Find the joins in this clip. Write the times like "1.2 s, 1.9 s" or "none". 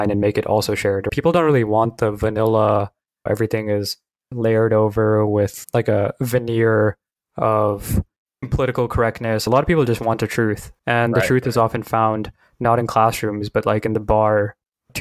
3.2 s, 9.4 s